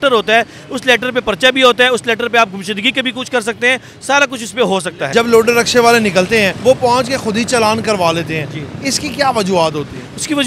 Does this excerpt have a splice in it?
yes; 2 cuts; at 5.1 s, 6.6 s

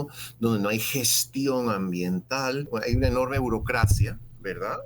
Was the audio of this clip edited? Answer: yes; 1 cut; at 2.6 s

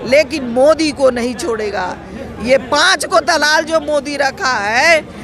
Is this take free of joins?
yes; 0 cuts

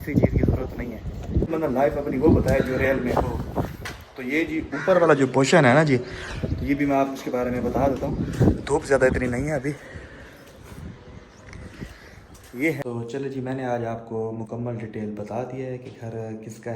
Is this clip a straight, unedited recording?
no; 2 cuts; at 1.5 s, 12.8 s

